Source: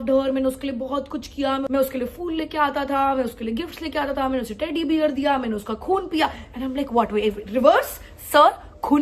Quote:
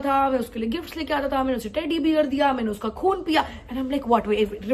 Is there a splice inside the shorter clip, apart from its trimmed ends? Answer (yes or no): no